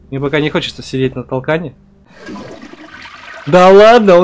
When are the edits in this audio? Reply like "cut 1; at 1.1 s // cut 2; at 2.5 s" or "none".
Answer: cut 1; at 2.1 s